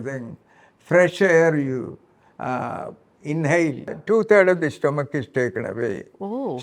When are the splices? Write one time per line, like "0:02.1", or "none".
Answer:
0:04.0